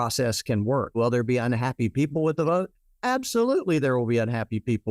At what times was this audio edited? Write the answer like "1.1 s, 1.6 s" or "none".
1.0 s